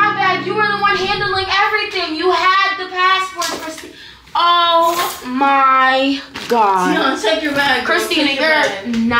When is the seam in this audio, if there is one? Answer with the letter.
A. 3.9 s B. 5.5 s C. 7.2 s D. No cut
D